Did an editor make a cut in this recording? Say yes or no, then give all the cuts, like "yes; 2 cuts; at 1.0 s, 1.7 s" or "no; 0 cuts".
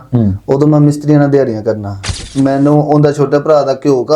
yes; 1 cut; at 2.2 s